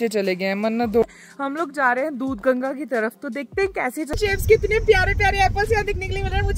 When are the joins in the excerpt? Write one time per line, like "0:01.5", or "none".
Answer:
0:01.0
0:04.2